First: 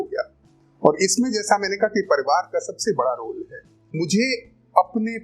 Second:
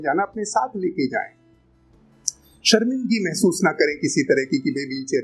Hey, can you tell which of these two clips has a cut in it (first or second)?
first